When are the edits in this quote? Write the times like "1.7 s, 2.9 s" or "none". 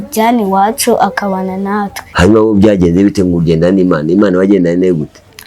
2.0 s